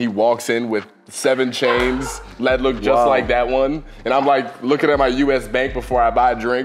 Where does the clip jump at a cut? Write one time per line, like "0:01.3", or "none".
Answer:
none